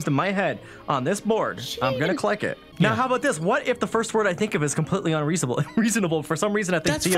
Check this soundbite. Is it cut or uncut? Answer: cut